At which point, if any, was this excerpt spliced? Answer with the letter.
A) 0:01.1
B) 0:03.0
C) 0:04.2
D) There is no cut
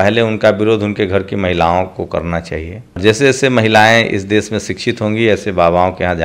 B